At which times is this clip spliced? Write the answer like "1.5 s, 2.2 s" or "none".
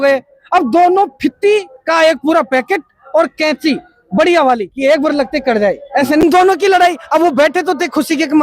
6.2 s